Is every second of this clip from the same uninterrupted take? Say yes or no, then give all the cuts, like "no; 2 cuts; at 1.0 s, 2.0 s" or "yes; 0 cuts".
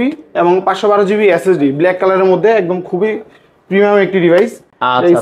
yes; 0 cuts